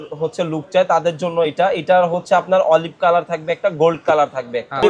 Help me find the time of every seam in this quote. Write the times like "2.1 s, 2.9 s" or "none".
none

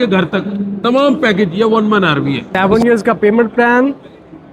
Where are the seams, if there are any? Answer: 2.5 s

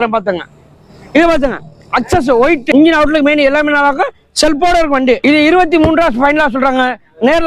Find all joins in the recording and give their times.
2.6 s, 5.2 s

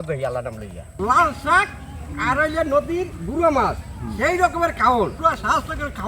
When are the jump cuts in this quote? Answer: 1.0 s, 5.2 s

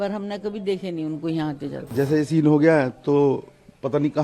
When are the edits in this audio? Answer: 1.9 s

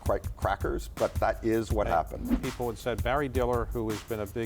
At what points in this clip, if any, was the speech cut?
2.4 s

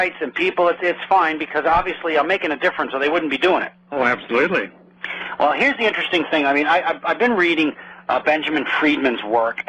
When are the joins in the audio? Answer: none

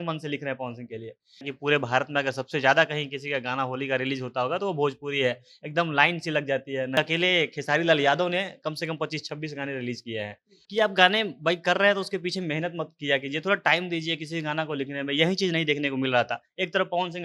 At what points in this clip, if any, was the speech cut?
1.5 s, 7.0 s, 10.5 s

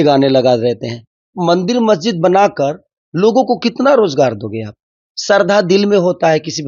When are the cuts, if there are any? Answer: 1.3 s

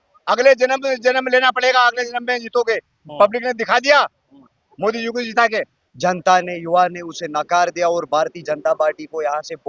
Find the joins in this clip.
5.8 s

